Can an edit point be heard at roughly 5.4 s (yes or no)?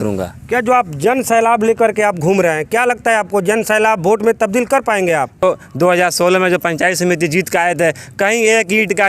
yes